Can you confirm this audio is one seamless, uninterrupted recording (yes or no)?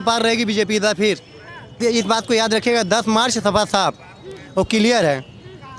no